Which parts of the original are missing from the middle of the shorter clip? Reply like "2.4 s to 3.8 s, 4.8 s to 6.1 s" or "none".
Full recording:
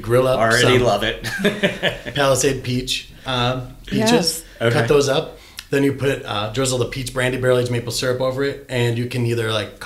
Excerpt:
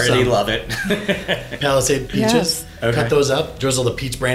2.6 s to 3.8 s, 5.3 s to 6.5 s